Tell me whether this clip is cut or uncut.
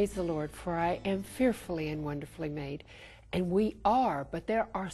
uncut